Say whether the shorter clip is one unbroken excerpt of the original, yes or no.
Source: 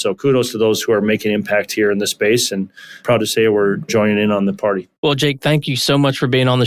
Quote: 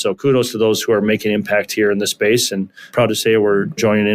no